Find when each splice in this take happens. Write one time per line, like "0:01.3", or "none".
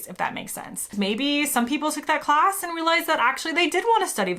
0:00.9